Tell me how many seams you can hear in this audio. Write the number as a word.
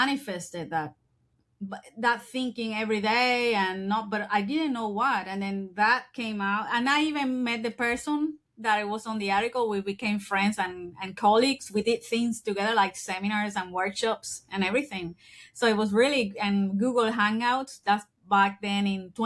zero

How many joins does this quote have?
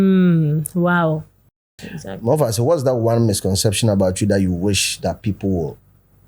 one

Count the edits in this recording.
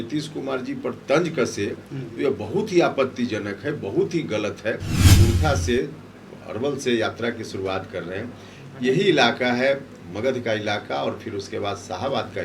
one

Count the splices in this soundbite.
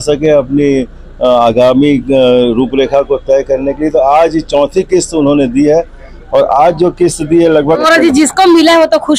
one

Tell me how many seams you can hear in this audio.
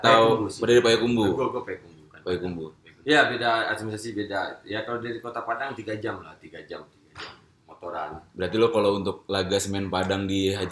one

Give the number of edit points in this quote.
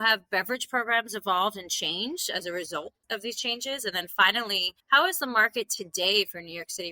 one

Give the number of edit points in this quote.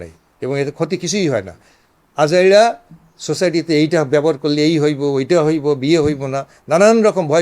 zero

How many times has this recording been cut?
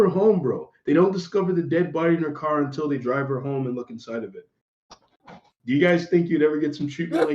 zero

